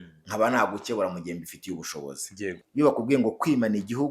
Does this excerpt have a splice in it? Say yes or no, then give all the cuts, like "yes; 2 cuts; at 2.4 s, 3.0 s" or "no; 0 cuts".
yes; 1 cut; at 2.6 s